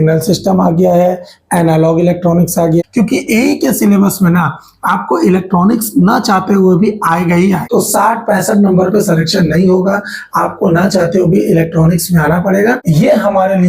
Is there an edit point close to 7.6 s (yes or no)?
yes